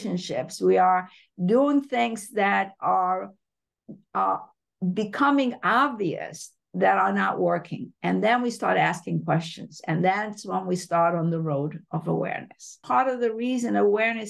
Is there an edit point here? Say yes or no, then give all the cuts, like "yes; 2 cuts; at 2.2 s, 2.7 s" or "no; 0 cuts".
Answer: yes; 1 cut; at 12.8 s